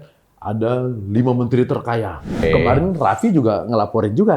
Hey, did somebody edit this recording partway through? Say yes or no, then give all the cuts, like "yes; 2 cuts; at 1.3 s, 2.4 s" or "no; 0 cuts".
yes; 1 cut; at 2.4 s